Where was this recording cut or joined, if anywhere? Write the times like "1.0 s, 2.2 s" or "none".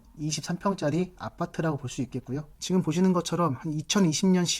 2.6 s